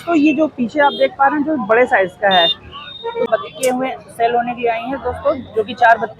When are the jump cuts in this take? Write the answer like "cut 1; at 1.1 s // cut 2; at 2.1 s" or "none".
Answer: cut 1; at 3.3 s